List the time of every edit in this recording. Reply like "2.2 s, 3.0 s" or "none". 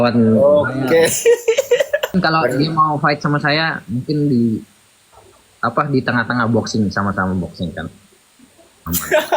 2.1 s